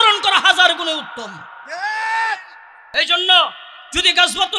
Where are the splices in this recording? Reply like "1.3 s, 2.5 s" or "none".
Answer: 2.8 s